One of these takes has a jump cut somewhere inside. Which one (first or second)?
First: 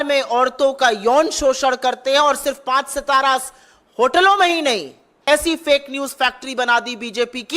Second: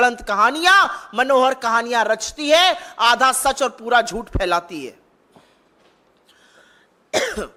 first